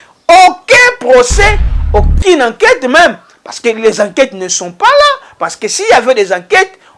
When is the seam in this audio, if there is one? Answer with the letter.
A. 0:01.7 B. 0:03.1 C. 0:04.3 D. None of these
A